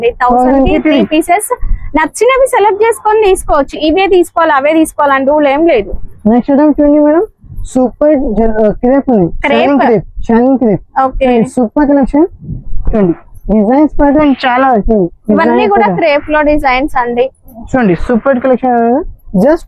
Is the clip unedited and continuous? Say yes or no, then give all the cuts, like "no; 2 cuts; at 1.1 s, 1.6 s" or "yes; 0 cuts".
yes; 0 cuts